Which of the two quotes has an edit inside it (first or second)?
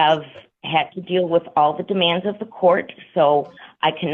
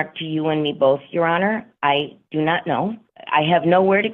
second